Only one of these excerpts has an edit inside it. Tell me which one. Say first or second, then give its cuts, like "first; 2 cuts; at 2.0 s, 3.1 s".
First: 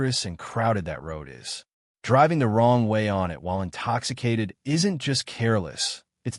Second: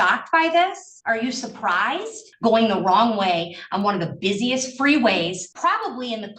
second; 3 cuts; at 0.9 s, 2.2 s, 5.5 s